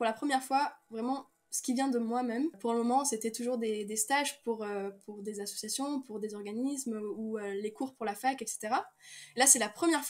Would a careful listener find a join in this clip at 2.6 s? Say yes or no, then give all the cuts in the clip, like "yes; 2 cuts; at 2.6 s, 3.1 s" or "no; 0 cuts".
yes; 1 cut; at 2.6 s